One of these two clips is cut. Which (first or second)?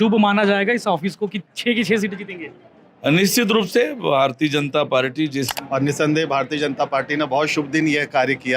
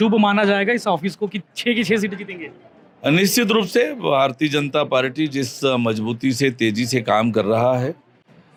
first